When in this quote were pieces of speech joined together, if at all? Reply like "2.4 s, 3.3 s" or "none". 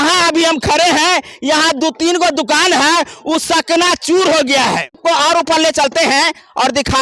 5.0 s